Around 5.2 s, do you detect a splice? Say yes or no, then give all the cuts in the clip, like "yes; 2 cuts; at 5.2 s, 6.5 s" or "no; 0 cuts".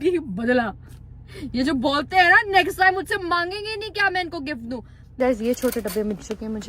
yes; 1 cut; at 5.2 s